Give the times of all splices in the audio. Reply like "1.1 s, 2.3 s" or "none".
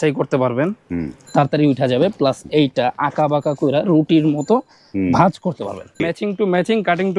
6.0 s